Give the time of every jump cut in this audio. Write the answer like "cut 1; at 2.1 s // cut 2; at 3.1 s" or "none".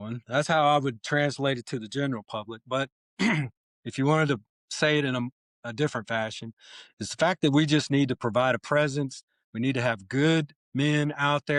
none